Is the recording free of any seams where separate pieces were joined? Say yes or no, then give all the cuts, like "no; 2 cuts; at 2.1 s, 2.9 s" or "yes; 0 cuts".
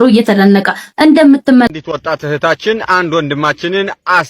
no; 1 cut; at 1.7 s